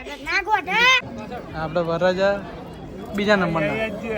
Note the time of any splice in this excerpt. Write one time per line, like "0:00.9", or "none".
0:01.1